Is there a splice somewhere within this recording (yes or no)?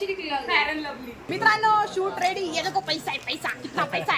yes